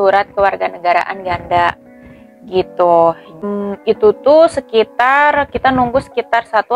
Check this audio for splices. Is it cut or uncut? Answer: uncut